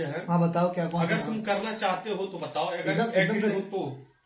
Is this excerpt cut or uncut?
uncut